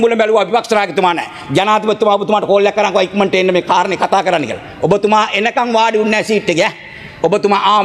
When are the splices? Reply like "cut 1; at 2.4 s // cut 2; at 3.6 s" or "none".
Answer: none